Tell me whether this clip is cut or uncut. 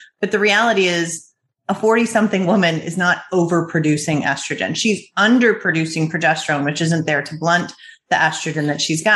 uncut